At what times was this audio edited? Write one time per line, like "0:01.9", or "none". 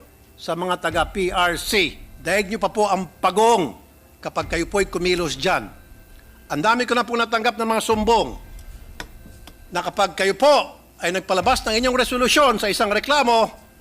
0:02.1